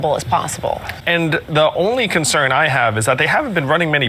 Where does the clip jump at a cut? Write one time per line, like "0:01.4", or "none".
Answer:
0:01.0